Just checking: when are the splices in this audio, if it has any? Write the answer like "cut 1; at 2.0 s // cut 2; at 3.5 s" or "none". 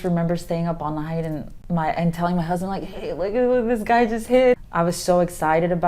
cut 1; at 1.5 s // cut 2; at 4.6 s